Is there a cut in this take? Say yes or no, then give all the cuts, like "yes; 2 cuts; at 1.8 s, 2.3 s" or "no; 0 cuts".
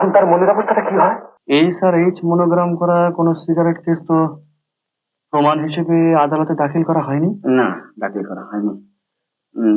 yes; 1 cut; at 1.3 s